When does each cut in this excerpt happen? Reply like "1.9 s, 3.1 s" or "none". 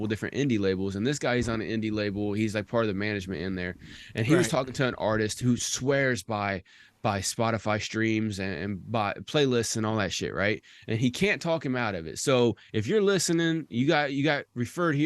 none